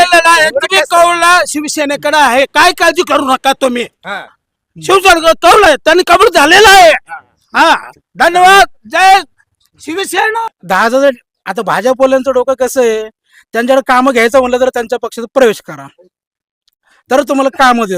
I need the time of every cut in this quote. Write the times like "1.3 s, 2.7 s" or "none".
10.4 s